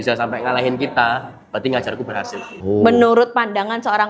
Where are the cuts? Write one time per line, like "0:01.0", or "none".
0:02.5